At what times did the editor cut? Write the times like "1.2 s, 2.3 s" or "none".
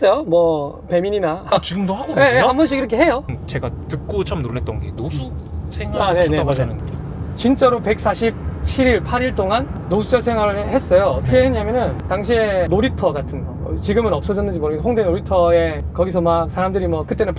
none